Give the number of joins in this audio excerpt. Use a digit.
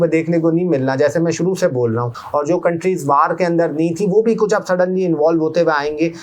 1